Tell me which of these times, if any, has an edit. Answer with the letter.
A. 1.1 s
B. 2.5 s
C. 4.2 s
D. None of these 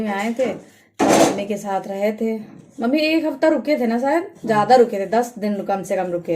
D